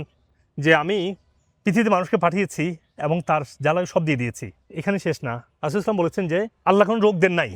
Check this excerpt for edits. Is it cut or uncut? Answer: uncut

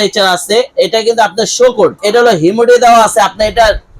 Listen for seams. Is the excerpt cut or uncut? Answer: cut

